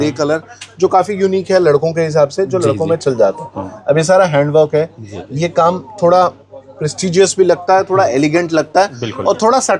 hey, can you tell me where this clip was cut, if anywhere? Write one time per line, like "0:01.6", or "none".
none